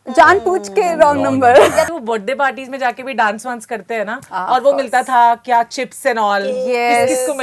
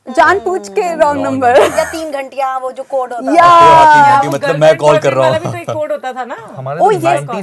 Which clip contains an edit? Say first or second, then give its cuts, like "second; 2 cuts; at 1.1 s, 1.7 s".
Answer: first; 1 cut; at 1.9 s